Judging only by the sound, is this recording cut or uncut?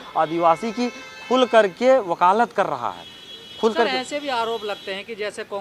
uncut